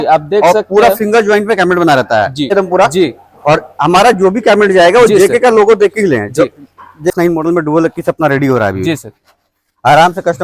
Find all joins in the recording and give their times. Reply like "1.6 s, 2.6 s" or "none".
2.5 s, 7.1 s